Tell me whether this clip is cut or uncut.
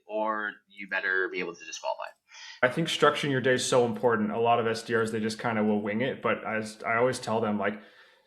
cut